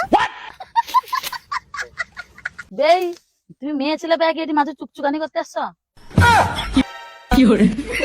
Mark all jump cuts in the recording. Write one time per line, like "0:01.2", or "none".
0:06.9